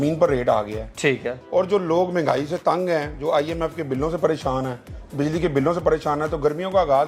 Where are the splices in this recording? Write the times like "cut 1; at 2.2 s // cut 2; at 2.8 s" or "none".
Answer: none

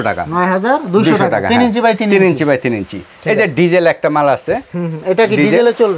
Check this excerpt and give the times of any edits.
none

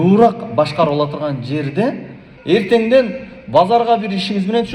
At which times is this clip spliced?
cut 1; at 2.2 s

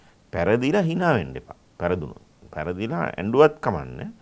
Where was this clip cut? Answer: none

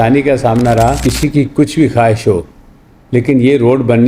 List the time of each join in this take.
cut 1; at 1.0 s

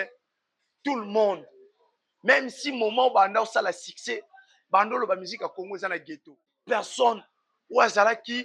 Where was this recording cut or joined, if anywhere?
cut 1; at 6.5 s

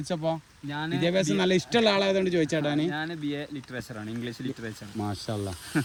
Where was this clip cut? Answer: none

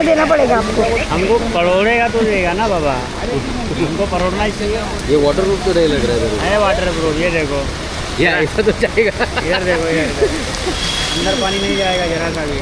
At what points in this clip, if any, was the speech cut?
none

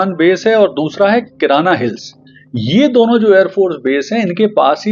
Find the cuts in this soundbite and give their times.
none

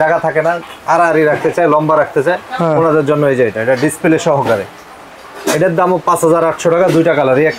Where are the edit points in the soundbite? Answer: none

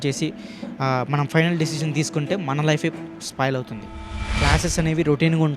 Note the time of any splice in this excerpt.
cut 1; at 4.1 s

